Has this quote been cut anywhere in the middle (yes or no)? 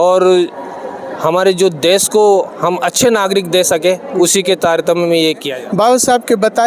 yes